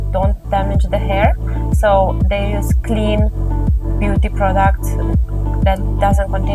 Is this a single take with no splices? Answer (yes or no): yes